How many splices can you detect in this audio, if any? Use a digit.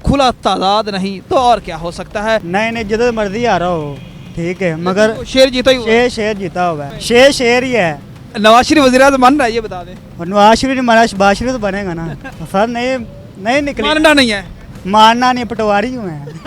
2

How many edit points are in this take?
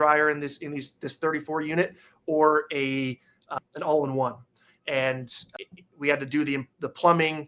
2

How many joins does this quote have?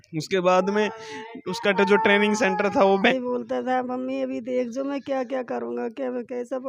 1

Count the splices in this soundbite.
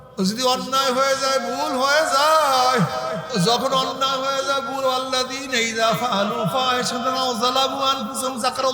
1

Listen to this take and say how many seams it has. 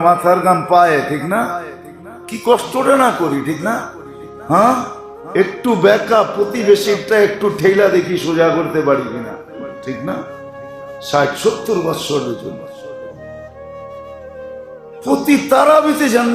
0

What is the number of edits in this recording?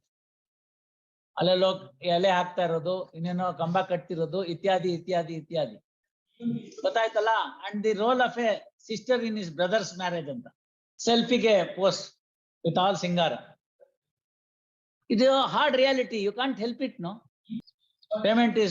1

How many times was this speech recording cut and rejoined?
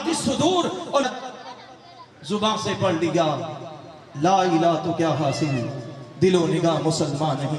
1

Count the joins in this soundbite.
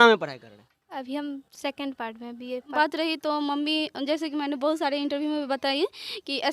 1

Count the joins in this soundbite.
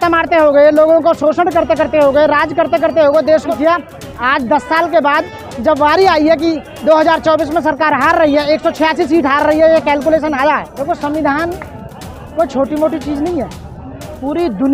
2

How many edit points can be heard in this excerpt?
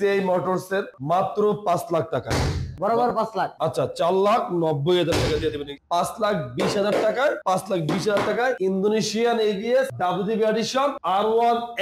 6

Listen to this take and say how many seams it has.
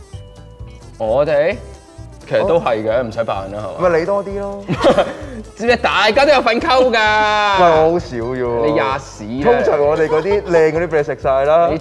0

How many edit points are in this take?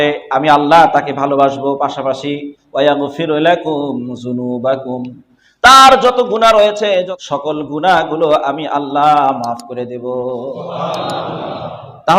1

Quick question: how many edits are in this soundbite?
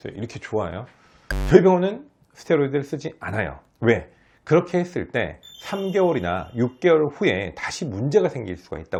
0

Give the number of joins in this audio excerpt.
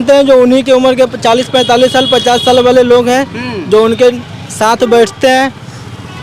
0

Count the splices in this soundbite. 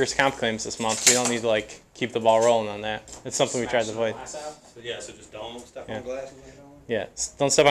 0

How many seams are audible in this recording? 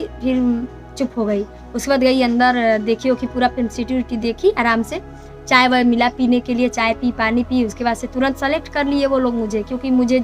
0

